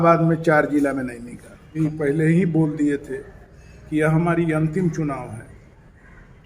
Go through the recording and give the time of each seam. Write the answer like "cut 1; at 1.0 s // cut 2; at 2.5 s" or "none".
cut 1; at 1.7 s

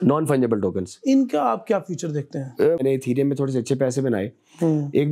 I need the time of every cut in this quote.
cut 1; at 2.8 s

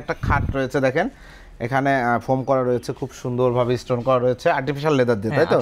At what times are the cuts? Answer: none

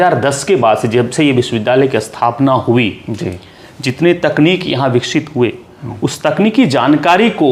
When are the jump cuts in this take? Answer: none

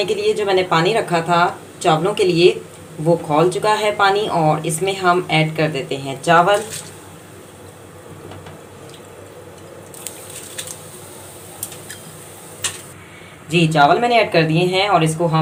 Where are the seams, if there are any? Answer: none

